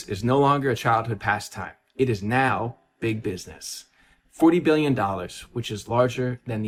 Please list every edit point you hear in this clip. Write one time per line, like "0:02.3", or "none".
none